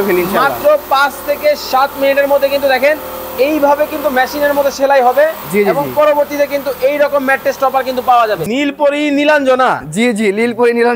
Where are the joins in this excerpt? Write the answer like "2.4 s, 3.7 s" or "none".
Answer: 8.4 s